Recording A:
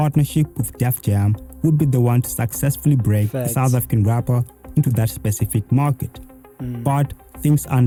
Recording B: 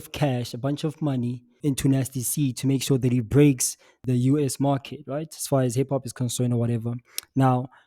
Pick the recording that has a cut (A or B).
B